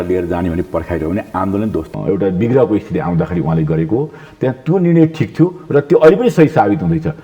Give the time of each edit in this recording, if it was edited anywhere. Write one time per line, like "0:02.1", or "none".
0:01.9